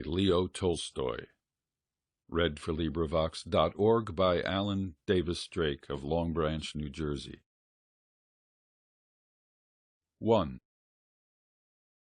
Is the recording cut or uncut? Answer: uncut